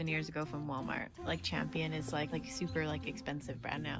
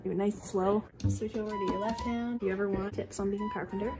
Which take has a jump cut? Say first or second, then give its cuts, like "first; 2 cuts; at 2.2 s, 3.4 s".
second; 2 cuts; at 1.0 s, 2.4 s